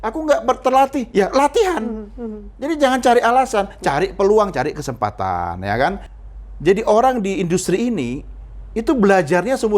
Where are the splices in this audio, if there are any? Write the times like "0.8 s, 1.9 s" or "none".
6.1 s